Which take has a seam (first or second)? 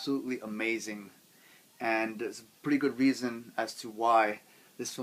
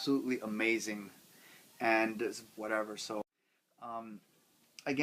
first